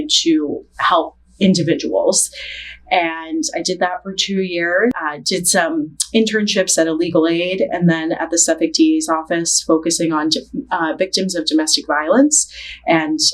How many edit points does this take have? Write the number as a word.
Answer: one